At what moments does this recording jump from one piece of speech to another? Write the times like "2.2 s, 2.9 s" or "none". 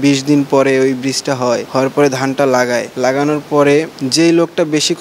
1.7 s, 2.9 s, 4.0 s